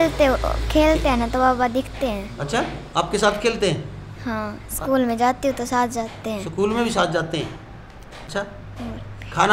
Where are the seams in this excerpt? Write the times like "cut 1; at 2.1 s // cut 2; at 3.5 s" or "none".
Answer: none